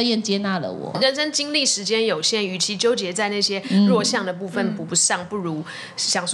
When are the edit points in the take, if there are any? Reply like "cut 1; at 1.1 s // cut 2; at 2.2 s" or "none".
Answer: cut 1; at 0.9 s